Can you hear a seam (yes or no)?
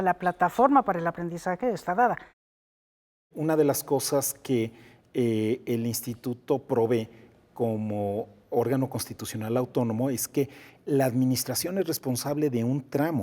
yes